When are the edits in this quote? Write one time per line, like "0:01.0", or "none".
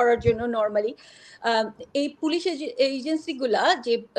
none